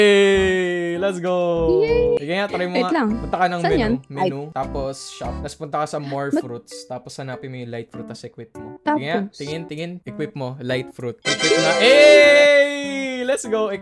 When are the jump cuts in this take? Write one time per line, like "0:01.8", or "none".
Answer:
0:08.7
0:10.0
0:11.2